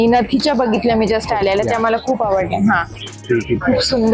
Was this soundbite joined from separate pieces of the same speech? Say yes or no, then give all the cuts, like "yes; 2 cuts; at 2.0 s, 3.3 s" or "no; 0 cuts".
no; 0 cuts